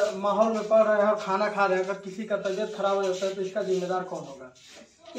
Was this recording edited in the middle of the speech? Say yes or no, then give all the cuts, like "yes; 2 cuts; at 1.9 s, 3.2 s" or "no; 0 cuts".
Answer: no; 0 cuts